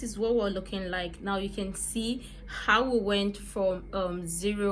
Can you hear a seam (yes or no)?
no